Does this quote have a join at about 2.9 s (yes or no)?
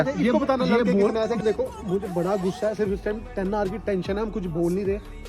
no